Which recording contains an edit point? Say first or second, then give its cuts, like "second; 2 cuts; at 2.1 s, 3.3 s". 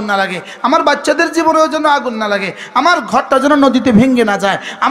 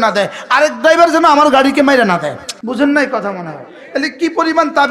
second; 1 cut; at 2.5 s